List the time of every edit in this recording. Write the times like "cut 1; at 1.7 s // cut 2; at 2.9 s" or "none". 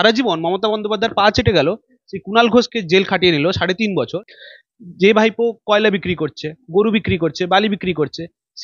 cut 1; at 4.1 s